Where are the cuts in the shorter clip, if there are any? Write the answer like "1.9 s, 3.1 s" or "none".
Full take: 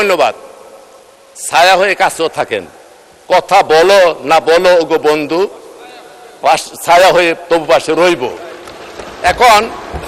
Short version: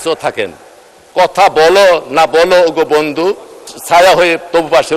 3.8 s